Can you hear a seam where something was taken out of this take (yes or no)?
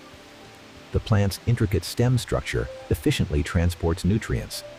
no